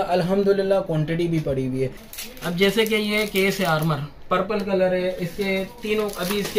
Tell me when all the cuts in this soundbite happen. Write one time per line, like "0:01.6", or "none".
0:02.1